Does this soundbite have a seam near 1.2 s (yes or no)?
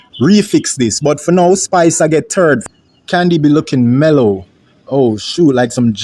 no